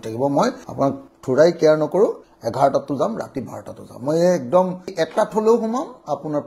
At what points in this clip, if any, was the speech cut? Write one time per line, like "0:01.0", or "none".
0:02.3
0:04.8